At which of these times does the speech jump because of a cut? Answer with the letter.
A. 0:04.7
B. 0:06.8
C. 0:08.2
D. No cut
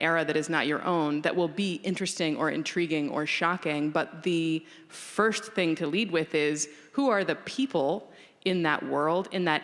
D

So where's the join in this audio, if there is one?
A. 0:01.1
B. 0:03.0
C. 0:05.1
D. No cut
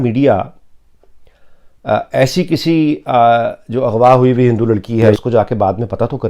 C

